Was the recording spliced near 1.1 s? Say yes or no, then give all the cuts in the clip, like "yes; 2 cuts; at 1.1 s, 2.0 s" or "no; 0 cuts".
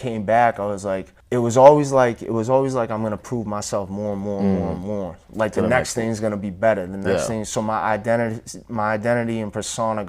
yes; 1 cut; at 1.1 s